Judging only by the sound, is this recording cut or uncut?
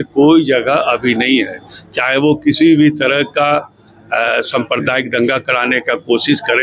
uncut